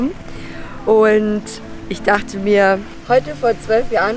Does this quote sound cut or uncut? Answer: cut